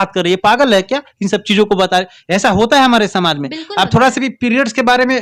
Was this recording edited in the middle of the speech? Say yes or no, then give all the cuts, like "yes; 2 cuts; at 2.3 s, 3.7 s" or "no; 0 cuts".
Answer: no; 0 cuts